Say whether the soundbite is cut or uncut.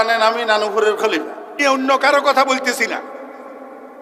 cut